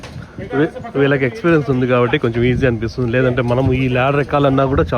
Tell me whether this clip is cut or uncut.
uncut